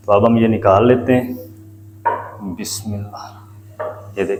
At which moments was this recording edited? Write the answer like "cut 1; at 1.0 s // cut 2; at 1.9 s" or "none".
none

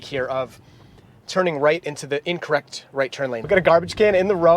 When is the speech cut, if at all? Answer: cut 1; at 3.4 s

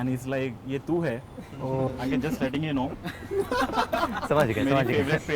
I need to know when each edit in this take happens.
cut 1; at 1.9 s

